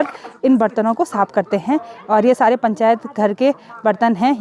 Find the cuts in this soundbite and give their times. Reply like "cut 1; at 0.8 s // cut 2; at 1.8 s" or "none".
none